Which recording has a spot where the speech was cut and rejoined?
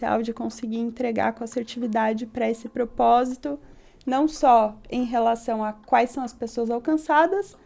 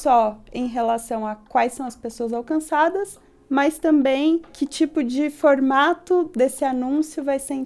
second; 1 cut; at 4.6 s

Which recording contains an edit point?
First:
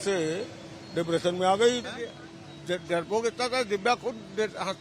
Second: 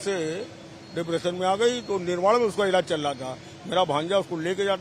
first; 1 cut; at 1.8 s

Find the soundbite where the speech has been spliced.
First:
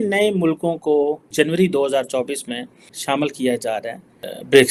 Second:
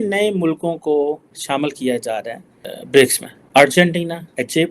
second; 1 cut; at 1.2 s

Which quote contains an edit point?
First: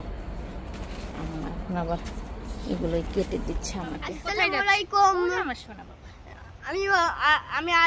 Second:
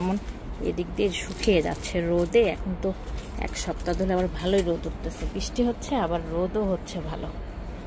first; 1 cut; at 4.2 s

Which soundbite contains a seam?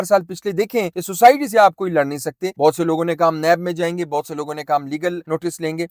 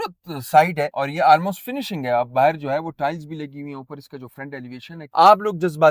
second; 2 cuts; at 0.9 s, 5.0 s

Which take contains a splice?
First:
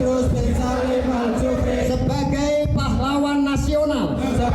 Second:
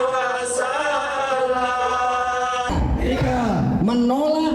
second; 1 cut; at 2.7 s

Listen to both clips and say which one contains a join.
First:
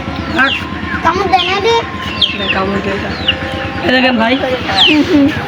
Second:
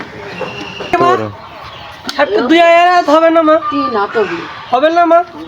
second; 1 cut; at 0.9 s

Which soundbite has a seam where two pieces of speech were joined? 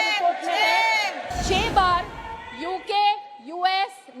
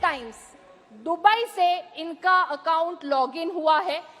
first; 1 cut; at 1.3 s

